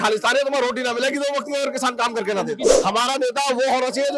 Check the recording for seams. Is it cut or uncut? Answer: cut